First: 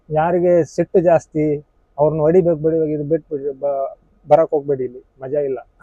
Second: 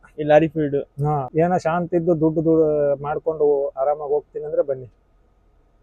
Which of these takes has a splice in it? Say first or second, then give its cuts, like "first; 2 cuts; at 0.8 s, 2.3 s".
second; 1 cut; at 1.2 s